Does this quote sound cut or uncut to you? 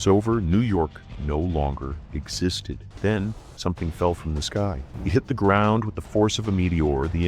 cut